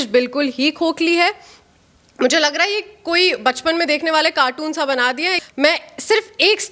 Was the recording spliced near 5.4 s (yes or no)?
yes